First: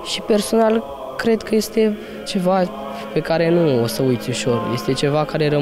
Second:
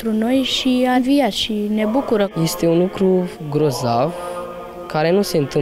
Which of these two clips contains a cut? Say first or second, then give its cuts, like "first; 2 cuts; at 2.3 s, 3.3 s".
second; 1 cut; at 2.3 s